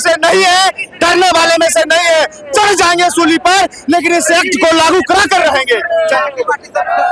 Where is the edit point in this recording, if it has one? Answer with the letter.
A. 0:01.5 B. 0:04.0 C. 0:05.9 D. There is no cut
D